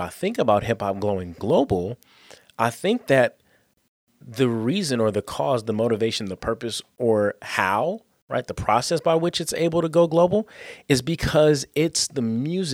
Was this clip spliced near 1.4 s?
yes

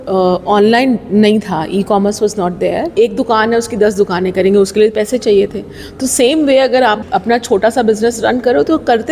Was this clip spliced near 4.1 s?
no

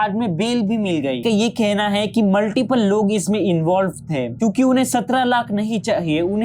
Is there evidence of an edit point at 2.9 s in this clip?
no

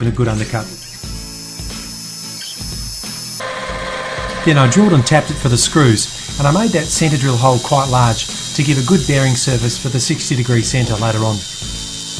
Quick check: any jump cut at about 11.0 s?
yes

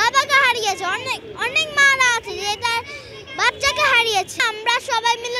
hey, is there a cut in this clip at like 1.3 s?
no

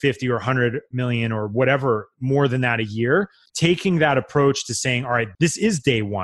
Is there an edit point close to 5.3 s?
yes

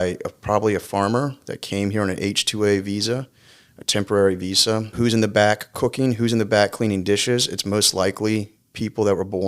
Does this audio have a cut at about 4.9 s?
yes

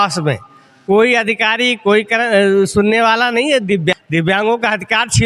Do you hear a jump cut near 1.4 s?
no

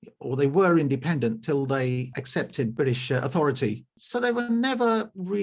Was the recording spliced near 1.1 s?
no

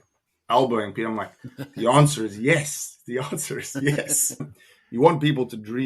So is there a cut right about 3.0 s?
no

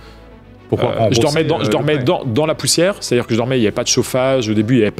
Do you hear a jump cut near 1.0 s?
no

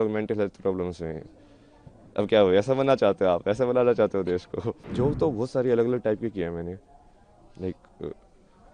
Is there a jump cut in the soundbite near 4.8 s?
yes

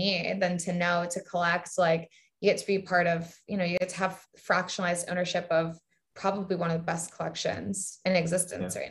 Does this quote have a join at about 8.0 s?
yes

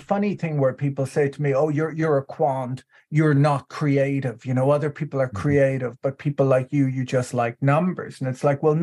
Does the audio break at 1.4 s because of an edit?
no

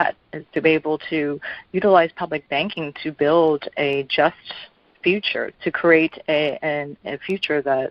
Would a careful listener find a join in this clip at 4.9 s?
no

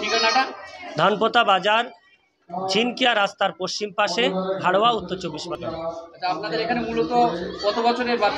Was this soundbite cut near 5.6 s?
no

